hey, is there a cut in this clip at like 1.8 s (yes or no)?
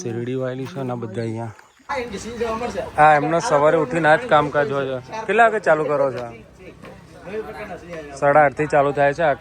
yes